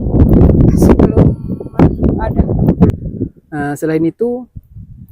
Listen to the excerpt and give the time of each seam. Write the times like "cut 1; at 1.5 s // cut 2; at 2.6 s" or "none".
cut 1; at 2.9 s